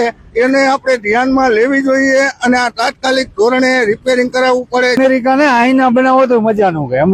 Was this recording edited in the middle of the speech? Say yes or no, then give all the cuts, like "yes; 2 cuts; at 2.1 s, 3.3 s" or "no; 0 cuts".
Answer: yes; 1 cut; at 5.0 s